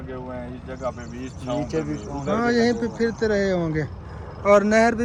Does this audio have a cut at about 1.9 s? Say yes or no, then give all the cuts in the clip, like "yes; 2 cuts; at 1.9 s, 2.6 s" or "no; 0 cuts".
no; 0 cuts